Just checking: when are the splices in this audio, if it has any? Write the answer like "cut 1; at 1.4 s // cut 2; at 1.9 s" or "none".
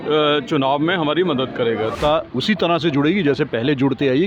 cut 1; at 1.9 s